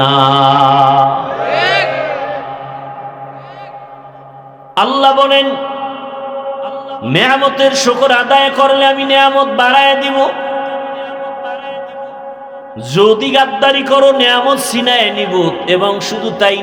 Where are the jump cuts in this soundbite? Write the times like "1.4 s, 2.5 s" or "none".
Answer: none